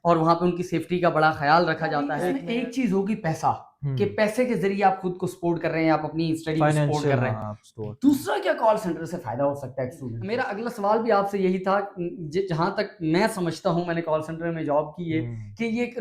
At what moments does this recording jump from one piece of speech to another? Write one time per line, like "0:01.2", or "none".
0:02.3
0:10.1